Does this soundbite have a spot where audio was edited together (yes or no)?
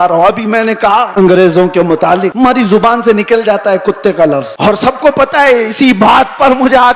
yes